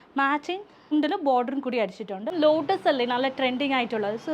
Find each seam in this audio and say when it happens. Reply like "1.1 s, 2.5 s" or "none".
2.3 s